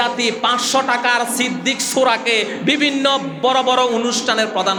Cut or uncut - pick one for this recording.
uncut